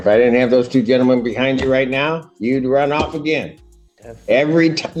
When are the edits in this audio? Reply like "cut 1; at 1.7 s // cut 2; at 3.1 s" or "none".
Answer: none